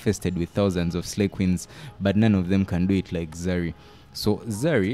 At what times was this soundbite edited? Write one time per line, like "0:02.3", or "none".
none